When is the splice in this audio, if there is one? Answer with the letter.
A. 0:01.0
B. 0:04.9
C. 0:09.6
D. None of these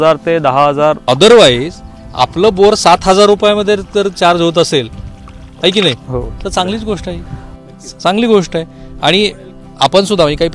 A